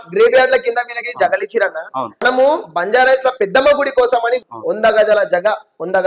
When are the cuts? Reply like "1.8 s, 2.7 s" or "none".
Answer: 2.2 s, 4.5 s